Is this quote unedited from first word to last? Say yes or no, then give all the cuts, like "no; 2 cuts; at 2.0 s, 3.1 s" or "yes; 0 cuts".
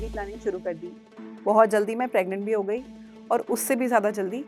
yes; 0 cuts